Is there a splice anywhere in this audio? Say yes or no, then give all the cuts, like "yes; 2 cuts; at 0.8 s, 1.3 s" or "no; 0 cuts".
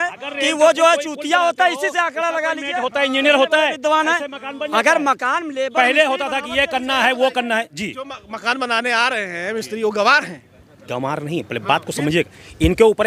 no; 0 cuts